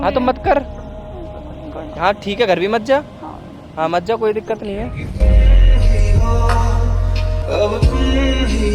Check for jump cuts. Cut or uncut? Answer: uncut